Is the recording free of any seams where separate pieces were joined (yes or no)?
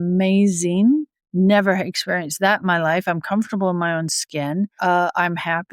no